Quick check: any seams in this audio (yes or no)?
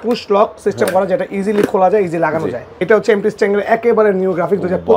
yes